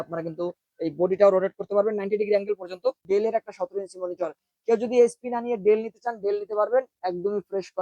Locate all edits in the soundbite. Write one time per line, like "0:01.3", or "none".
0:03.0